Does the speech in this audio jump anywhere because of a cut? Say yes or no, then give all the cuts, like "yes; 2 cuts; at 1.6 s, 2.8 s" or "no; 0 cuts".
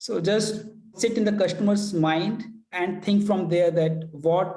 yes; 1 cut; at 0.9 s